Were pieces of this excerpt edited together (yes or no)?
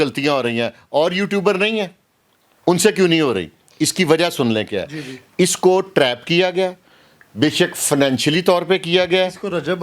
no